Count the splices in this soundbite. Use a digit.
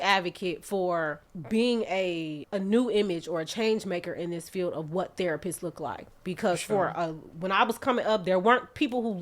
2